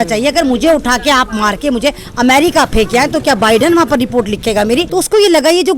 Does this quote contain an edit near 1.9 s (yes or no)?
no